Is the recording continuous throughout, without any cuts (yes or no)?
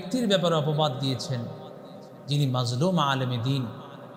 yes